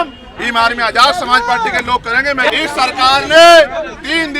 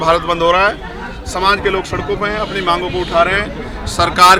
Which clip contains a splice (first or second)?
first